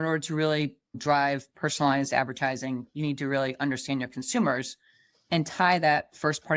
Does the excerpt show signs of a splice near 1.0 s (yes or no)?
yes